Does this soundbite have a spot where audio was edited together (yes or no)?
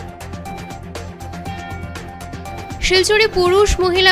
no